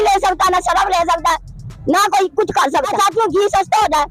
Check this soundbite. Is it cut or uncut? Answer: cut